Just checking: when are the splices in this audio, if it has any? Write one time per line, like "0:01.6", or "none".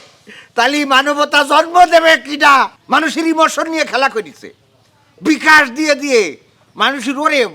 0:02.7